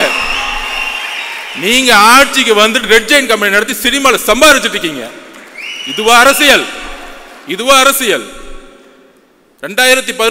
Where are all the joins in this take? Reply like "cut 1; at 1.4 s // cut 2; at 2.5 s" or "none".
none